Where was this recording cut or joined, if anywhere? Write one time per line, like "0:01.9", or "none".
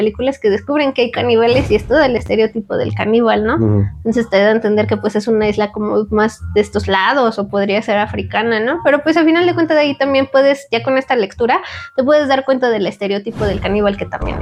none